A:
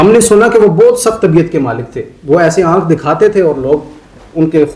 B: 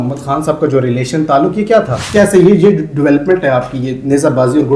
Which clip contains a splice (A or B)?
B